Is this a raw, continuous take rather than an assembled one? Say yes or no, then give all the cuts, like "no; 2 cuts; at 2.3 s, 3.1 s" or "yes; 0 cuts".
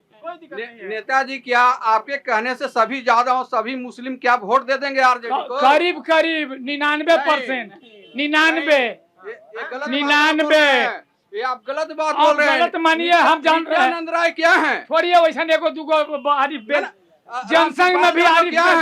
yes; 0 cuts